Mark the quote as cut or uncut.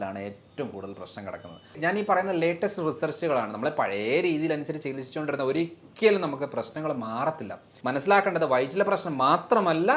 cut